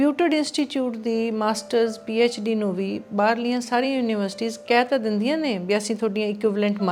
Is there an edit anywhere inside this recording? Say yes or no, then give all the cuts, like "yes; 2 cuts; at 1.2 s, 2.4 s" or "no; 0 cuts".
no; 0 cuts